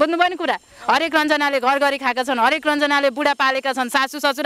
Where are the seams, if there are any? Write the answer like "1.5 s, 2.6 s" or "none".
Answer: none